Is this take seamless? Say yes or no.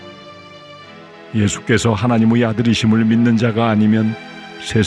no